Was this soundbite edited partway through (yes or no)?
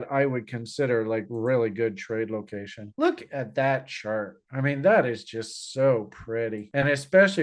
no